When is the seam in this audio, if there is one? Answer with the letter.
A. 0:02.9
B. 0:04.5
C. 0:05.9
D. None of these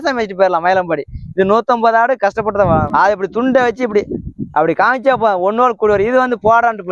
A